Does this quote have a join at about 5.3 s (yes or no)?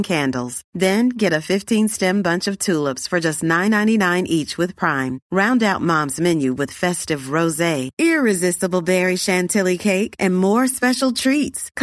no